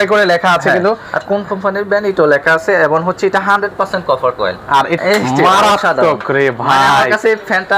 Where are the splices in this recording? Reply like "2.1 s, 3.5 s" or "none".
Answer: 5.0 s